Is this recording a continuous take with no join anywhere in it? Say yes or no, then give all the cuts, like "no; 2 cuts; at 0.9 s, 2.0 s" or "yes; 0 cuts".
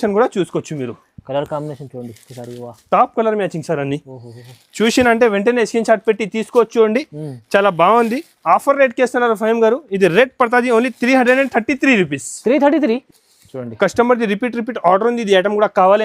no; 1 cut; at 13.0 s